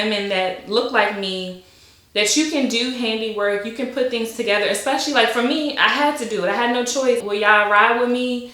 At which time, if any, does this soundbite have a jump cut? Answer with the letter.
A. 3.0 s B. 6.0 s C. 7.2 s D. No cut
C